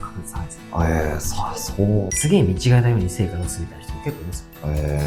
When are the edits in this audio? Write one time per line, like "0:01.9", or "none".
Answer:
0:02.1